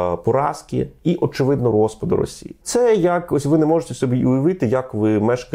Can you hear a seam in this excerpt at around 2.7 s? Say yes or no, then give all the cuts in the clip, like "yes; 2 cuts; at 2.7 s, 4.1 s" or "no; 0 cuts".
yes; 1 cut; at 2.7 s